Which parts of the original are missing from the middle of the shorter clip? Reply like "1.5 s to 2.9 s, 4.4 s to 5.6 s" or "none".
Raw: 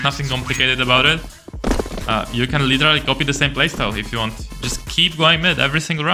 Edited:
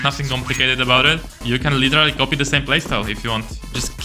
1.4 s to 2.3 s